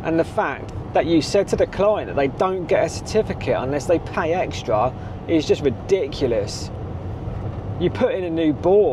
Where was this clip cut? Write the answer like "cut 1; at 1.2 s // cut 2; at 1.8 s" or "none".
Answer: none